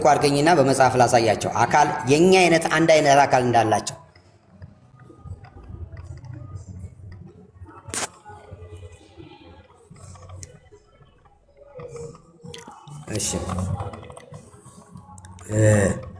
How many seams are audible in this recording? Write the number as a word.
zero